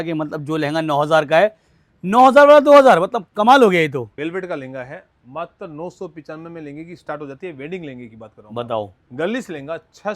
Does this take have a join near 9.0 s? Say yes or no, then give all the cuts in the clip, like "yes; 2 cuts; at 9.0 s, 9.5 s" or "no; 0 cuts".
yes; 2 cuts; at 4.1 s, 9.0 s